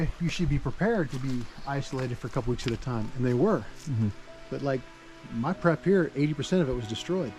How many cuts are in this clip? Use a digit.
0